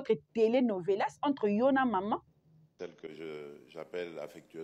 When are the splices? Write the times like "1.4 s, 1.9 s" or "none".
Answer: 2.7 s